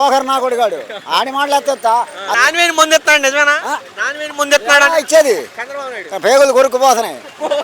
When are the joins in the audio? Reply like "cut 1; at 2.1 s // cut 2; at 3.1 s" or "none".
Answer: cut 1; at 2.3 s